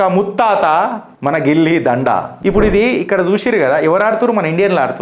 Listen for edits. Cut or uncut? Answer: cut